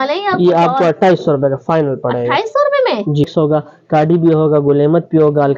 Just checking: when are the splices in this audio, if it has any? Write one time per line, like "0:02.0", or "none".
0:03.3